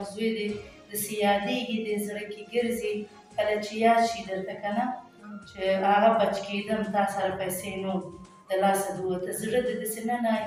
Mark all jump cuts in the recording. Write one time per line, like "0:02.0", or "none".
none